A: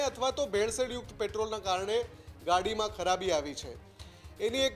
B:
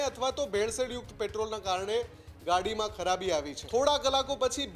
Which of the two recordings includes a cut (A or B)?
B